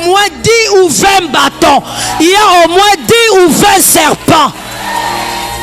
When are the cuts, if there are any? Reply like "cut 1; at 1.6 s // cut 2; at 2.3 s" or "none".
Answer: none

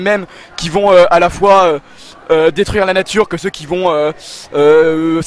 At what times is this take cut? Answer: none

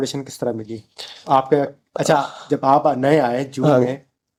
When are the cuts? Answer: none

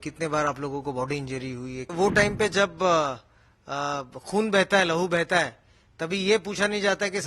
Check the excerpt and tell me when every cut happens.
cut 1; at 1.9 s

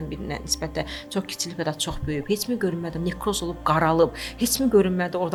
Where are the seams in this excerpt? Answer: none

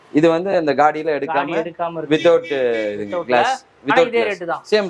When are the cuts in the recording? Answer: none

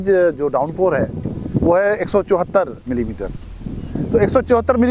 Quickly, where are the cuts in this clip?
none

